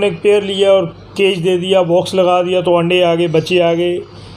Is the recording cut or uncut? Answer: uncut